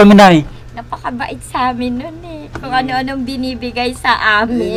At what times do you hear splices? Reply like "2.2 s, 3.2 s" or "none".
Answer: none